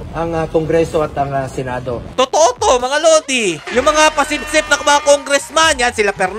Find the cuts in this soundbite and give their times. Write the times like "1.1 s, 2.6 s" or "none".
2.0 s, 3.6 s